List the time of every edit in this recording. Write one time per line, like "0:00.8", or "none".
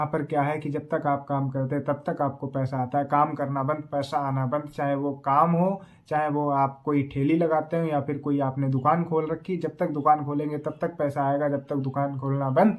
none